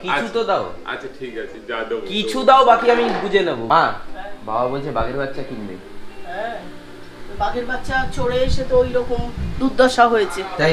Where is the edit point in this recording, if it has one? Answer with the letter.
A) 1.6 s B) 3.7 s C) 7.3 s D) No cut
B